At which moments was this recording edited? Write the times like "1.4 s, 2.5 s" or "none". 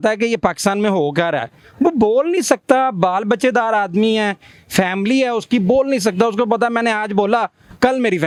none